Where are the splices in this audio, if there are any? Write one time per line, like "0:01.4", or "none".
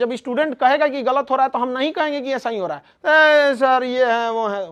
none

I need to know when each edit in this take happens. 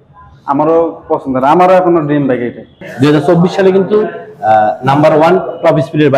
0:02.8

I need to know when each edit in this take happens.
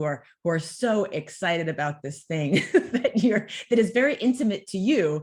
none

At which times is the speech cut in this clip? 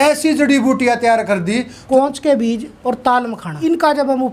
0:01.8
0:02.7
0:03.5

